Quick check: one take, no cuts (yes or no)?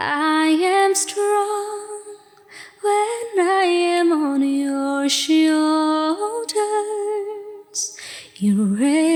yes